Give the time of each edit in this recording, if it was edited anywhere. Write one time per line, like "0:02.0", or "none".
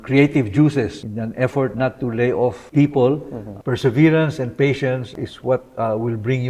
0:01.0
0:02.6
0:03.5
0:05.1